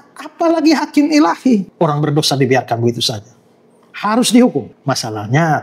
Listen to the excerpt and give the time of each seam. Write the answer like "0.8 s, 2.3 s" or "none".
1.7 s, 4.7 s